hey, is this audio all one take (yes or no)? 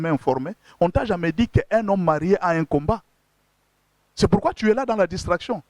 yes